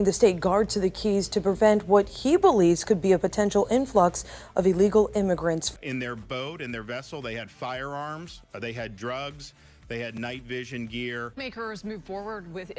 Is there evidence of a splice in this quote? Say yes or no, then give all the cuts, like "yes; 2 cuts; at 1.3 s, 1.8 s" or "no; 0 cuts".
yes; 2 cuts; at 5.7 s, 11.2 s